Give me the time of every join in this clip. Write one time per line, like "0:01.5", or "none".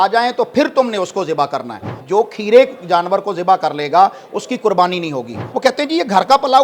0:01.9
0:05.4